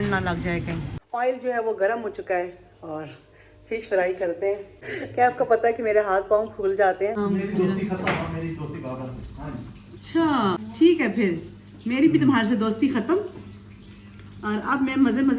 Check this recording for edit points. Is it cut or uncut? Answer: cut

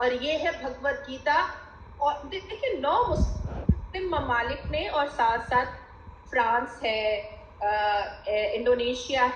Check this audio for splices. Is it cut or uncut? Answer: cut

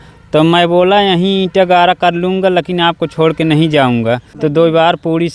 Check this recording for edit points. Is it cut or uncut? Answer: cut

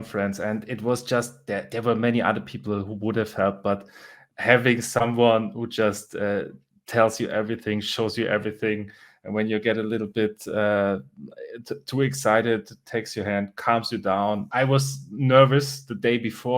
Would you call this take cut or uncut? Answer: cut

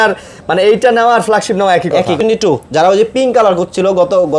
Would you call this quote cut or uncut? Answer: cut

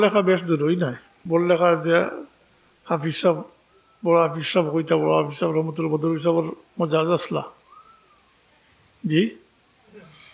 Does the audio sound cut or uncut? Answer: cut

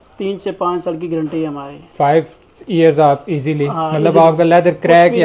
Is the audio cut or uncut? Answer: uncut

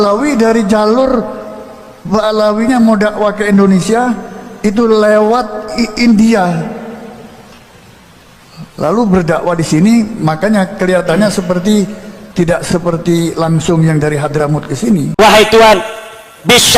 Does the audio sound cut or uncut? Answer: cut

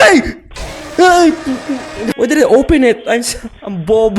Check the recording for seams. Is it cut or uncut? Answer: cut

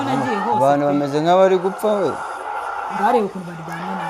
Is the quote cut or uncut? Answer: uncut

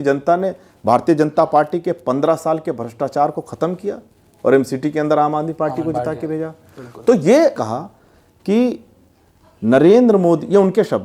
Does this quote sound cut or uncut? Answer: cut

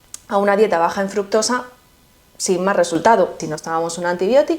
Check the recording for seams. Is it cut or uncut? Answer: cut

